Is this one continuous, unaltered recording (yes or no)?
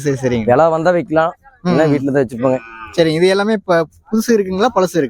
yes